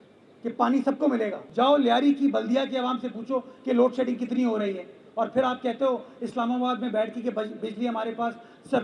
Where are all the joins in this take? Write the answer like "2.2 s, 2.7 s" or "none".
1.4 s